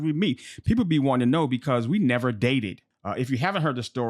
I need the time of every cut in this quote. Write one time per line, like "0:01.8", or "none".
0:02.9